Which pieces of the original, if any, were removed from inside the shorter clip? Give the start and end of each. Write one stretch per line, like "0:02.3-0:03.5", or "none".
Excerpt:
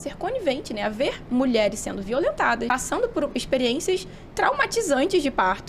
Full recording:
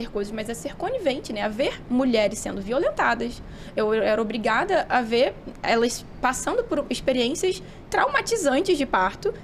0:03.3-0:06.2